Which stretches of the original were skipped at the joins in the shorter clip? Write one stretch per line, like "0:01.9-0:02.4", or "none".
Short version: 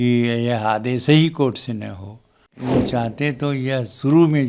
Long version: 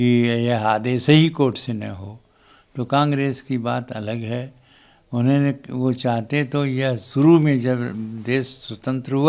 0:02.5-0:05.7